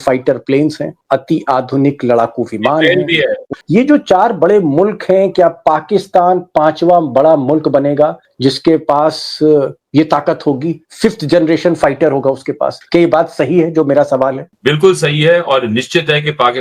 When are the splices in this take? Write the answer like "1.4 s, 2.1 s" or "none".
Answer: none